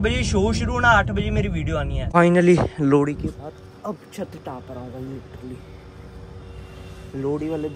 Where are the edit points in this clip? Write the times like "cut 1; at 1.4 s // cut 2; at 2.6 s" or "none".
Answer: cut 1; at 2.0 s